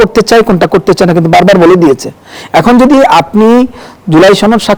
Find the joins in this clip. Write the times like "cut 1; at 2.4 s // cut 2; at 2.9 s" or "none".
none

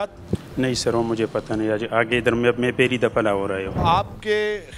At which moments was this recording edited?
cut 1; at 3.8 s

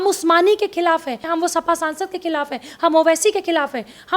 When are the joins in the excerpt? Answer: cut 1; at 1.3 s

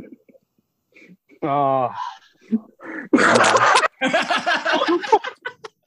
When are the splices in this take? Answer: none

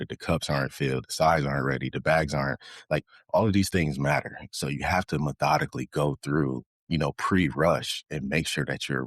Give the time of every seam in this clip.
cut 1; at 6.7 s

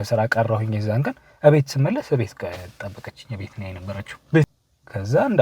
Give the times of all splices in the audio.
cut 1; at 4.5 s

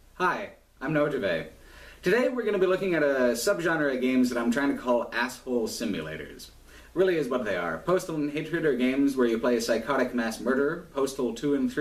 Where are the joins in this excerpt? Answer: none

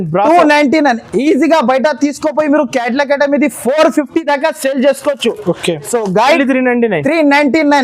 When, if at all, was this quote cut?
cut 1; at 6.4 s

